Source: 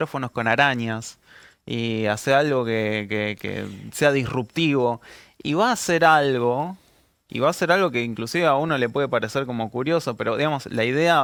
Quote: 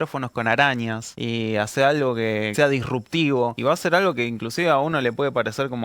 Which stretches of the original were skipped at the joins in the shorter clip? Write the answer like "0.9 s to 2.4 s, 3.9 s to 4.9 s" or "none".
1.1 s to 1.6 s, 3.0 s to 3.9 s, 5.0 s to 7.3 s